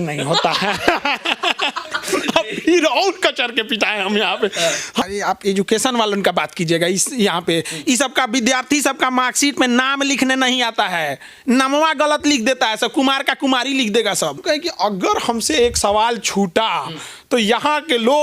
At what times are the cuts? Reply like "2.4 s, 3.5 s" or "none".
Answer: 5.0 s, 14.4 s